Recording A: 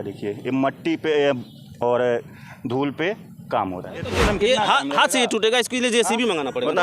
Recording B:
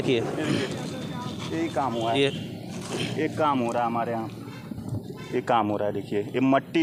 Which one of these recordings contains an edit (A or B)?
A